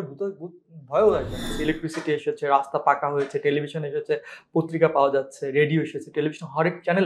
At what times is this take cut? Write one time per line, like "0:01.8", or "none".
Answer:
0:01.5